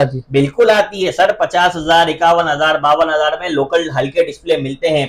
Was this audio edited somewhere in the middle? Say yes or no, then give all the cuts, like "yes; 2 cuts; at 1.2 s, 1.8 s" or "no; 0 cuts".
no; 0 cuts